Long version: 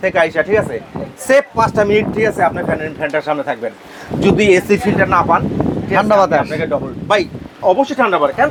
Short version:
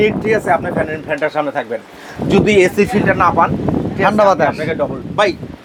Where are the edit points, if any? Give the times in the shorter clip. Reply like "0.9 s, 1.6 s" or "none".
none

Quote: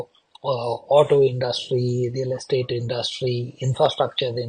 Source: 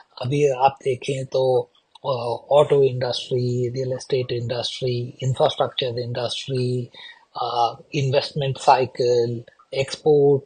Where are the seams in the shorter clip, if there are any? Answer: none

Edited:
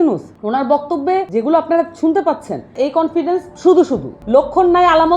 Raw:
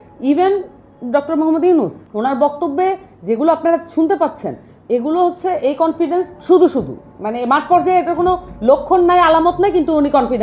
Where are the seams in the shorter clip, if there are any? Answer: 1.3 s, 2.7 s, 4.1 s

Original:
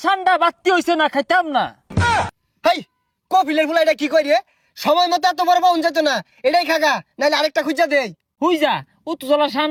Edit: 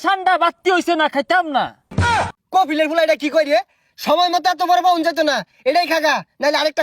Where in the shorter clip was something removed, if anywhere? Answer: 2.0 s

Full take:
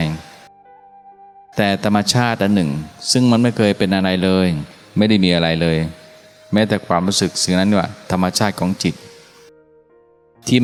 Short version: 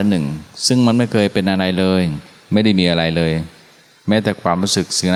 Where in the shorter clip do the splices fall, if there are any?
none

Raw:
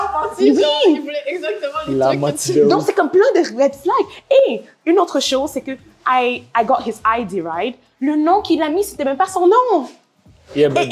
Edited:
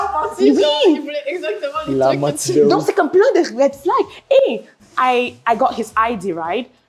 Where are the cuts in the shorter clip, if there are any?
4.7 s

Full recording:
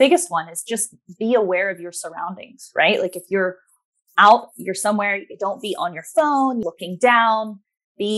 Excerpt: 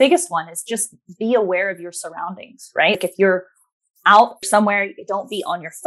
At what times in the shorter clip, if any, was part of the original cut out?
3.0 s, 4.4 s

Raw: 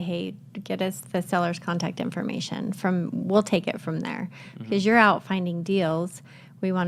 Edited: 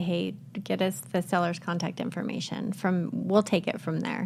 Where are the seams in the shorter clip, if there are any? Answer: none

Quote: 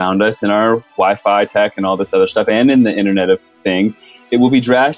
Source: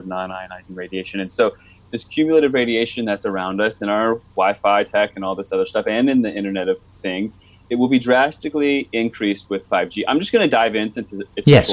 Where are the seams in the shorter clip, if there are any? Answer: none

